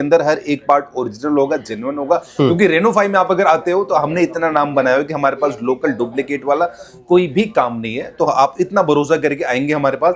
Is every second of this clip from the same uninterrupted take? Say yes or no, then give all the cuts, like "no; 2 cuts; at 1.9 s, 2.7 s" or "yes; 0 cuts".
yes; 0 cuts